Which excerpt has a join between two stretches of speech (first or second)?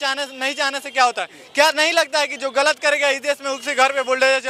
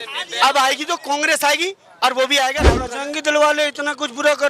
second